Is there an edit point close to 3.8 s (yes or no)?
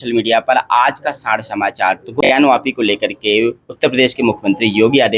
no